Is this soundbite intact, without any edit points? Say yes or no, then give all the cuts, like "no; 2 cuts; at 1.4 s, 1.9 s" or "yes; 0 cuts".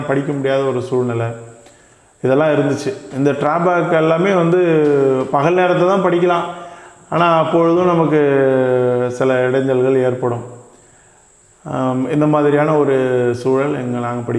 yes; 0 cuts